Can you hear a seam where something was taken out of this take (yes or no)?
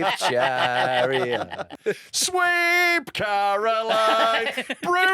yes